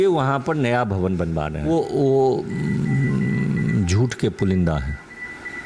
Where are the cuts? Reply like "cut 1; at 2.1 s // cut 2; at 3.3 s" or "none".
cut 1; at 1.7 s